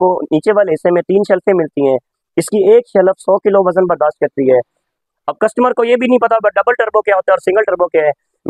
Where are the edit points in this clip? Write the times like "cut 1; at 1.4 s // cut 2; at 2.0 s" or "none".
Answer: cut 1; at 4.9 s

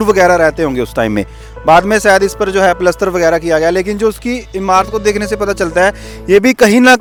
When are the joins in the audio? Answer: none

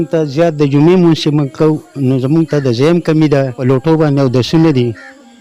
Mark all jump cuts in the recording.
cut 1; at 3.6 s

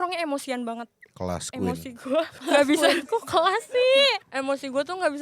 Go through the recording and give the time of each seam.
cut 1; at 2.4 s // cut 2; at 4.2 s

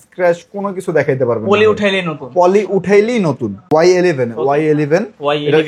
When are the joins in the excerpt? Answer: cut 1; at 3.7 s

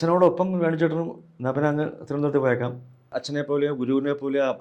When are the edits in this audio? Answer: cut 1; at 3.2 s

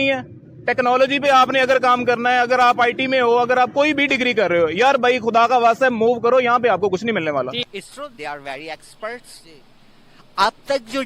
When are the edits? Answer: cut 1; at 7.6 s

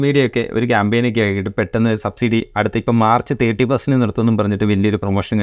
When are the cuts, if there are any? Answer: none

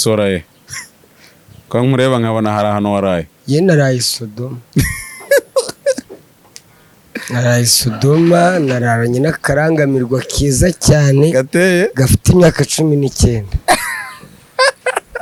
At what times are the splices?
none

